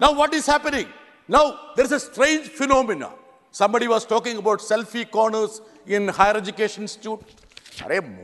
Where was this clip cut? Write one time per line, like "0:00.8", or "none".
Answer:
none